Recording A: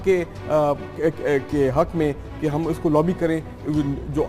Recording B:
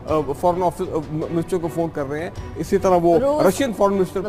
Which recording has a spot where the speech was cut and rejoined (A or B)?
A